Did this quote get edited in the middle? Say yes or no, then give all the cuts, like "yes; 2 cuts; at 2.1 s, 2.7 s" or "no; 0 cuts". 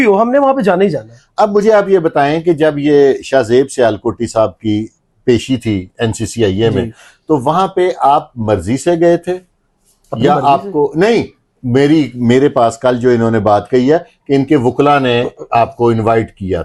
no; 0 cuts